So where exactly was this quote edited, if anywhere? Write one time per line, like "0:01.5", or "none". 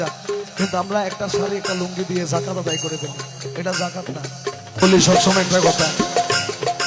0:04.8